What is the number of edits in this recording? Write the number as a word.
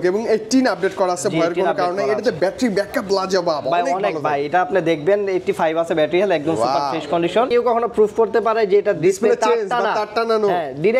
one